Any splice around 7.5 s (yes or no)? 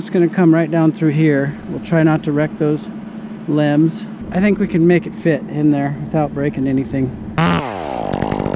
yes